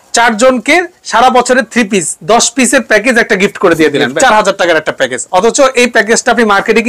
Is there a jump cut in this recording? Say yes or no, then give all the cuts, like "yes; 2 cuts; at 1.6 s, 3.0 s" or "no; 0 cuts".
yes; 1 cut; at 4.1 s